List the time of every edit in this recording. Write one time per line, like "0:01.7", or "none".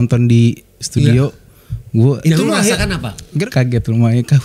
0:03.5